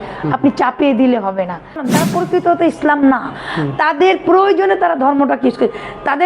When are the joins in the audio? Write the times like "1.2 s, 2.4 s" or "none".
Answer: 1.8 s